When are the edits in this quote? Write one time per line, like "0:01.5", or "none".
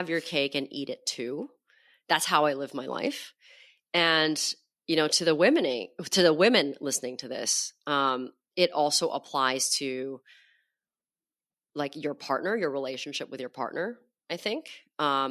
none